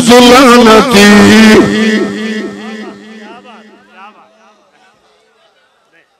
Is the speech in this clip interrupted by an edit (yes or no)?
no